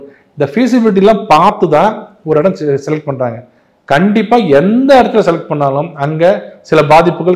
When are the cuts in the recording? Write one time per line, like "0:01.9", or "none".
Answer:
none